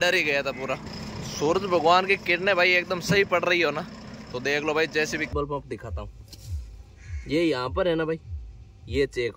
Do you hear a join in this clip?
yes; 2 cuts; at 0.9 s, 5.3 s

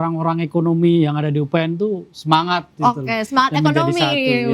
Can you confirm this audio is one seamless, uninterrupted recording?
yes; 0 cuts

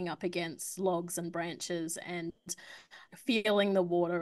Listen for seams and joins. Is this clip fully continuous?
no; 1 cut; at 3.0 s

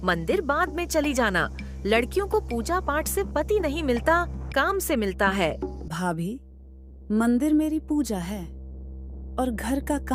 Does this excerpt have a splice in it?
no; 0 cuts

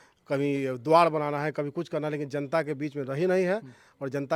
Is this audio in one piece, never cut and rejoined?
yes; 0 cuts

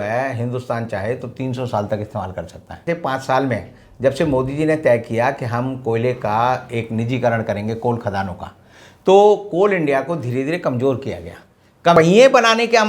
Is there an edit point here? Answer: yes; 2 cuts; at 2.7 s, 12.0 s

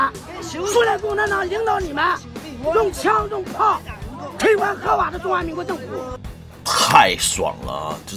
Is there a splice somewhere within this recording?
yes; 1 cut; at 6.2 s

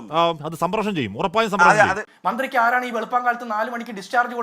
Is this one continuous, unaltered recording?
no; 1 cut; at 2.0 s

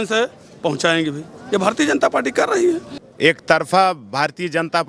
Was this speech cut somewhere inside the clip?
yes; 1 cut; at 2.9 s

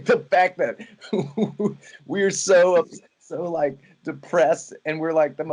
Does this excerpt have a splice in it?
no; 0 cuts

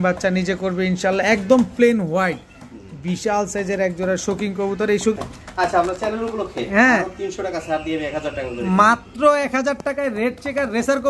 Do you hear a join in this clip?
yes; 1 cut; at 5.2 s

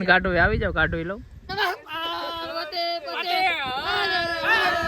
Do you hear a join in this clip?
yes; 1 cut; at 1.5 s

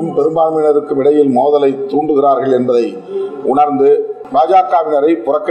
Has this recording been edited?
yes; 1 cut; at 4.2 s

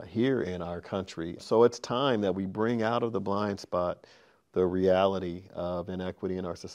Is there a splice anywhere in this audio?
yes; 1 cut; at 1.4 s

